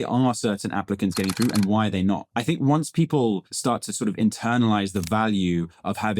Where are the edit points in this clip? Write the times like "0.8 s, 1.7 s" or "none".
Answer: 2.3 s, 3.5 s